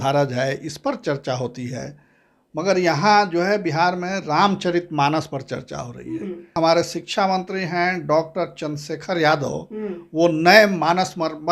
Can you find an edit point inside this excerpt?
yes; 1 cut; at 6.5 s

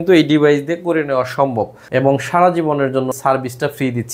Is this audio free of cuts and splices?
no; 1 cut; at 1.9 s

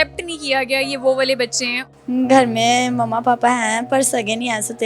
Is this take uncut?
no; 1 cut; at 1.7 s

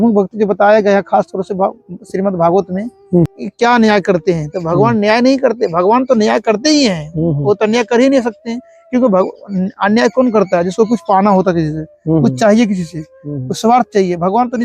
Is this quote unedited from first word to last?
no; 1 cut; at 3.4 s

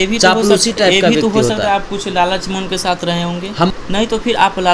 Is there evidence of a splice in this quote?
yes; 1 cut; at 3.7 s

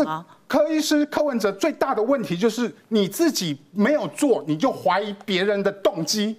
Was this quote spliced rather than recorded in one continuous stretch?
no; 0 cuts

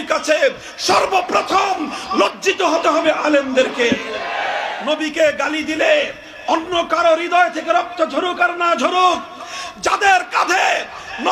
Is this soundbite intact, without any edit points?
no; 1 cut; at 4.7 s

